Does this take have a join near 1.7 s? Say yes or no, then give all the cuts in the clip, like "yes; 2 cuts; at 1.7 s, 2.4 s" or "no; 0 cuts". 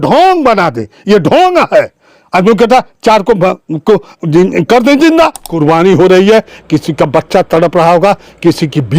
no; 1 cut; at 5.5 s